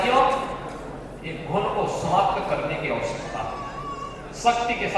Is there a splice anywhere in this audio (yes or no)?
no